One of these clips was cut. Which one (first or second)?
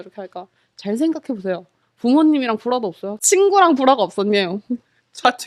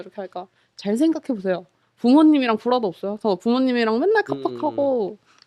first